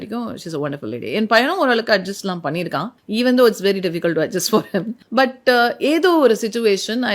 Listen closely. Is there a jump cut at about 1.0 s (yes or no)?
no